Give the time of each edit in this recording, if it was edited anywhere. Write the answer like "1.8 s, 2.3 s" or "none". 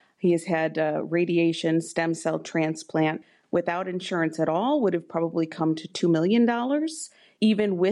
3.2 s